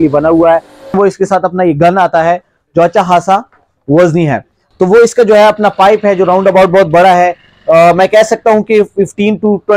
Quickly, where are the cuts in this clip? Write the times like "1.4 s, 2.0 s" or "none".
0.9 s, 4.6 s